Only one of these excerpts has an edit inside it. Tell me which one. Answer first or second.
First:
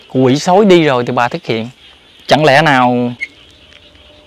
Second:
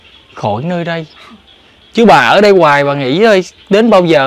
first